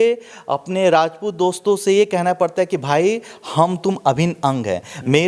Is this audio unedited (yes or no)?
yes